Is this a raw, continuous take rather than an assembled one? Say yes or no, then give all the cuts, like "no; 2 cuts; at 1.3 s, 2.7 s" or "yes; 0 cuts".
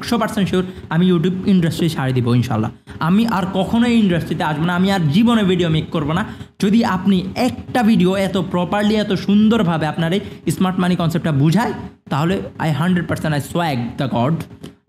yes; 0 cuts